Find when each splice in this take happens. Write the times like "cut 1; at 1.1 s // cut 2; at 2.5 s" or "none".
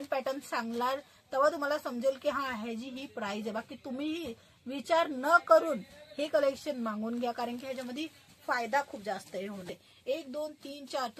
cut 1; at 9.7 s